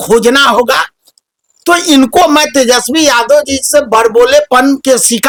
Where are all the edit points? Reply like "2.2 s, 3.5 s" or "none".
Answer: none